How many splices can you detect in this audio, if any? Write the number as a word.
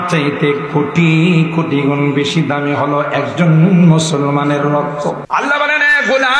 one